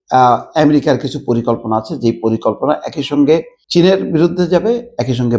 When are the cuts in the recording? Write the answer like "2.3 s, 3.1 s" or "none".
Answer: 3.6 s